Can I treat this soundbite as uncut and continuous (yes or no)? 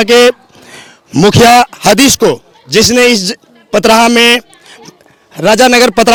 yes